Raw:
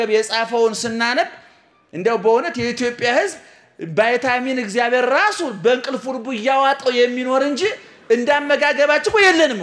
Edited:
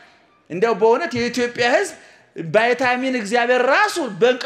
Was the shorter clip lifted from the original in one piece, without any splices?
yes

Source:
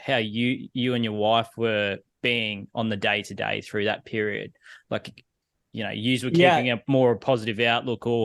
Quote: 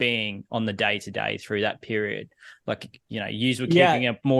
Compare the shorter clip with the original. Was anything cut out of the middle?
yes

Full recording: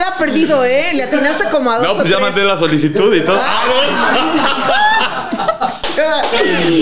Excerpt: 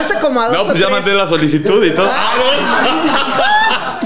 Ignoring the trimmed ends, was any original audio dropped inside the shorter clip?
no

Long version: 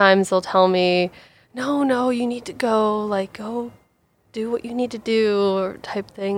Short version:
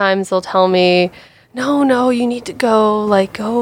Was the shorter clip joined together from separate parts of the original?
no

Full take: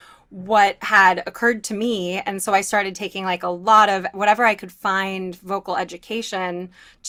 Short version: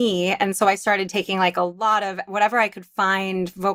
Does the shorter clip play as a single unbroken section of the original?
yes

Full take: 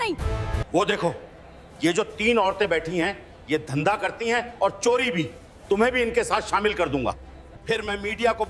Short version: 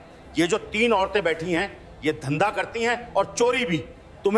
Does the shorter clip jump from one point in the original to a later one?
no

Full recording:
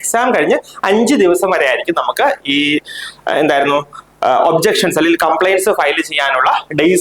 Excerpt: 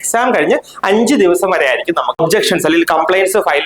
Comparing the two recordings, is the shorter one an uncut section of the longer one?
no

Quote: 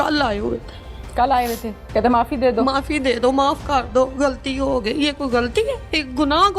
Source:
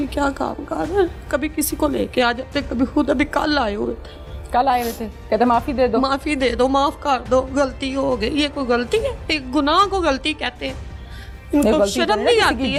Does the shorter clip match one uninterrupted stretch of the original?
yes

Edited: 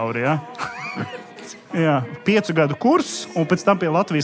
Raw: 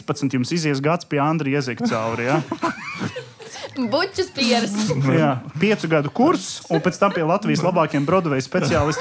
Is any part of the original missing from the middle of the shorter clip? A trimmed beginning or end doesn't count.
yes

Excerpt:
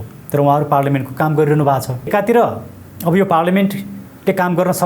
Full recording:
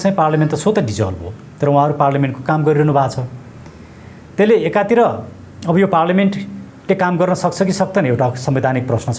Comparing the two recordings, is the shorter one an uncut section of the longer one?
no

